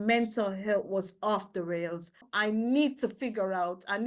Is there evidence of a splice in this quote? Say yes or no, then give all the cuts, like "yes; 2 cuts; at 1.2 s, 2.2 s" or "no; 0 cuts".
yes; 1 cut; at 2.3 s